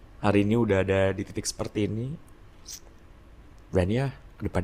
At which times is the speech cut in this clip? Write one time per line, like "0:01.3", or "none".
none